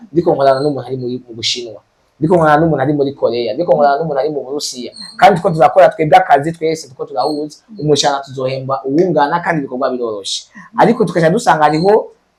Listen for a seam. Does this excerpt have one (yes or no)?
no